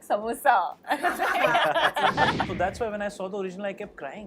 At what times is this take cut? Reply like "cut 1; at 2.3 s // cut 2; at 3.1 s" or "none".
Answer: cut 1; at 2.5 s